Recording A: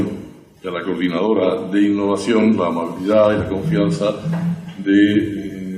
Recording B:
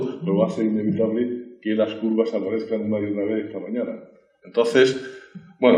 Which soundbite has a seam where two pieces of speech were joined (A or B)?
A